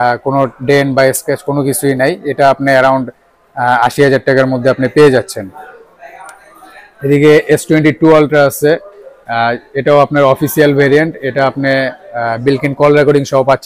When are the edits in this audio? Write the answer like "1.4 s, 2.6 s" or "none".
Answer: none

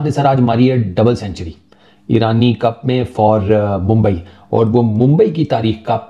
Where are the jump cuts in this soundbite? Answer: none

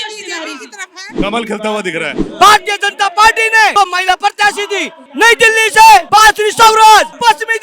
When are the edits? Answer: 2.2 s, 3.7 s

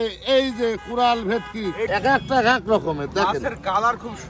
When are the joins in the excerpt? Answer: 1.9 s

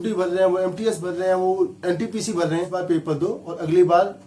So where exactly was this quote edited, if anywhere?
2.8 s

